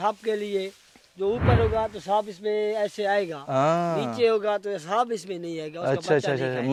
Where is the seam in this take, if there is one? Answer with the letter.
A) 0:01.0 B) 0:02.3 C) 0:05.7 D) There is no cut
D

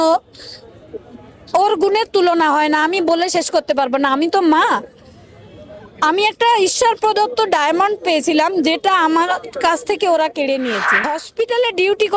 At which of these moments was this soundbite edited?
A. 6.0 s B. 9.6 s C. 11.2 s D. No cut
C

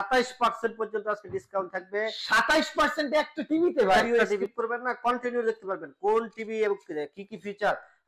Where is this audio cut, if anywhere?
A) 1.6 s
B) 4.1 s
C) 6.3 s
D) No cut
B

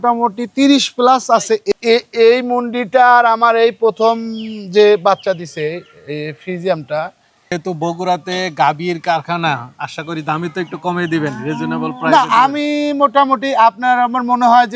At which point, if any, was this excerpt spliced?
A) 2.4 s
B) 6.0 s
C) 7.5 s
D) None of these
C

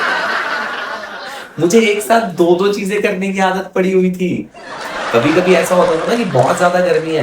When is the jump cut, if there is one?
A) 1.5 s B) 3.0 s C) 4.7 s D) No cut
A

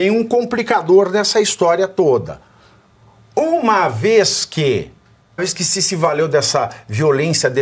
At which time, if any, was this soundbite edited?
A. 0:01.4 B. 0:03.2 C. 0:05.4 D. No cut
C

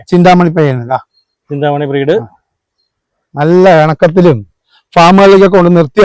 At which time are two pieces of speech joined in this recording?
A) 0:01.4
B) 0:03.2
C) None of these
C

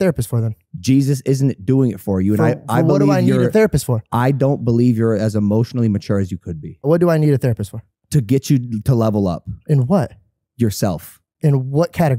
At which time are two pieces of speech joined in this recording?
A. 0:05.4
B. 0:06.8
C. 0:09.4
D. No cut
B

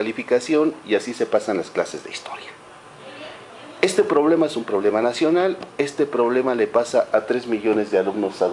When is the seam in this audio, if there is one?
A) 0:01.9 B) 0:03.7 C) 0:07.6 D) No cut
A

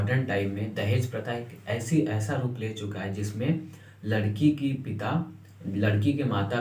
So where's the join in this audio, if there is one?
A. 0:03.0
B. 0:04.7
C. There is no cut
C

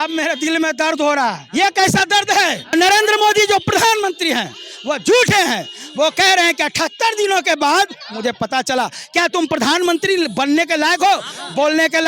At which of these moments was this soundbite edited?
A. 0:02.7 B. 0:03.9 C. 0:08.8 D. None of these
A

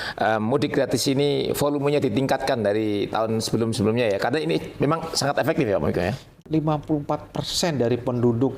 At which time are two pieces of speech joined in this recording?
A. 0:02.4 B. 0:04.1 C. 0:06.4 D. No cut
C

